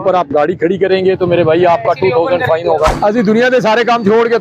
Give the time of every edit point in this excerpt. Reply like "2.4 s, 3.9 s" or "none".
2.9 s